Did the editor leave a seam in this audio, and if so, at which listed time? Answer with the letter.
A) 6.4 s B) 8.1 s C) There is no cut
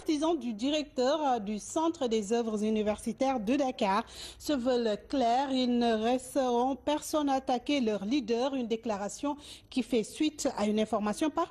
A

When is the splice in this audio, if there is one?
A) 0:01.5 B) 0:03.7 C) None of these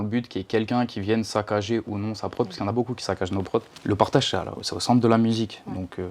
B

